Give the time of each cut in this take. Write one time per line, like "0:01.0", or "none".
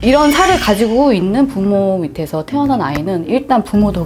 none